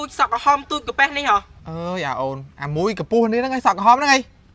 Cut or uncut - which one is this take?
cut